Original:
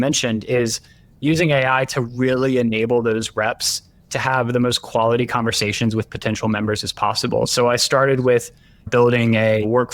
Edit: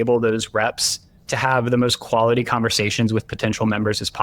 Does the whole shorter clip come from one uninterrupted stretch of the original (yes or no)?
yes